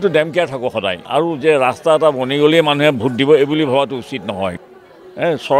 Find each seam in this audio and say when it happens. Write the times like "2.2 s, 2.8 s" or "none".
1.0 s, 4.6 s